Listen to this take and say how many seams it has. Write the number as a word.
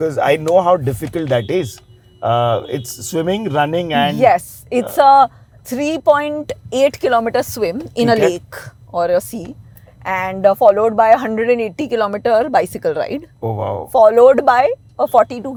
zero